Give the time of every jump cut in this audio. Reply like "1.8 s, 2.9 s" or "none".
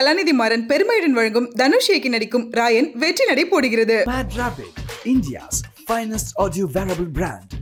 none